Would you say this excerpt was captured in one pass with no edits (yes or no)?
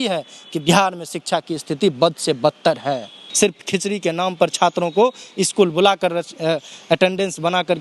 no